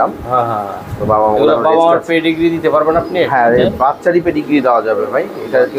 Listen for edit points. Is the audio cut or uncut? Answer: uncut